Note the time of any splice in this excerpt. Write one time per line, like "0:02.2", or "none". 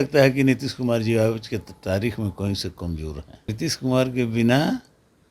0:03.5